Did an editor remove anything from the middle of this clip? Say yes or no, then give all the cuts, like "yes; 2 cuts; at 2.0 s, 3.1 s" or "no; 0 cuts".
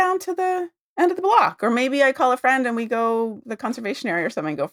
yes; 1 cut; at 3.4 s